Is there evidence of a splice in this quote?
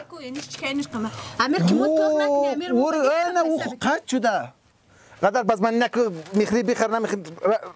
no; 0 cuts

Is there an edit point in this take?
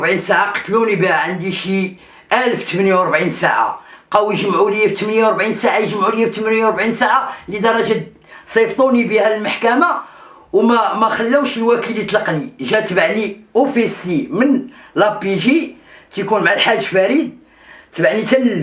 no; 0 cuts

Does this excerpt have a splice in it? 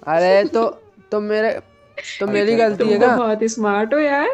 yes; 1 cut; at 3.1 s

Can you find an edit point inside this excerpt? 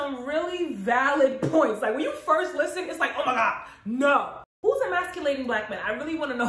yes; 1 cut; at 4.4 s

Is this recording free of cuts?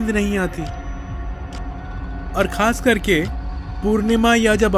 yes; 0 cuts

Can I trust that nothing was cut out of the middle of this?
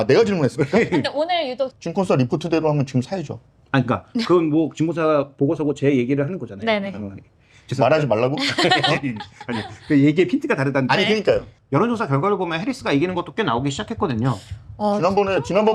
no; 2 cuts; at 1.7 s, 11.5 s

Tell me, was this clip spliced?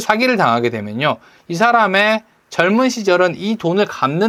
no; 0 cuts

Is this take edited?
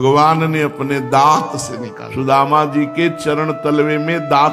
no; 0 cuts

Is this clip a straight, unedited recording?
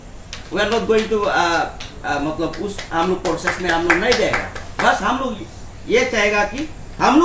yes; 0 cuts

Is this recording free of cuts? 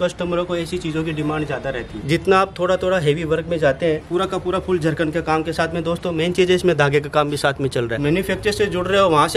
no; 3 cuts; at 1.9 s, 4.0 s, 8.0 s

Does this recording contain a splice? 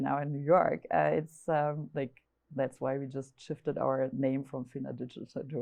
no; 0 cuts

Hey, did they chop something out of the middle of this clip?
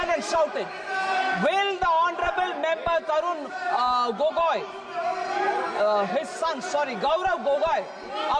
no; 0 cuts

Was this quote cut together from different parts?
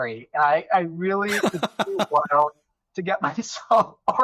no; 0 cuts

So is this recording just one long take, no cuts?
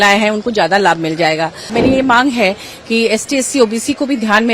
no; 1 cut; at 1.7 s

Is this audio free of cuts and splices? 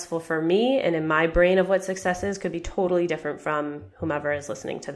yes; 0 cuts

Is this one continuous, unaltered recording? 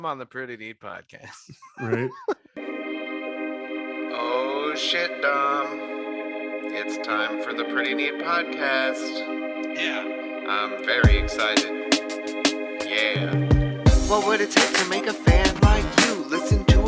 no; 1 cut; at 2.5 s

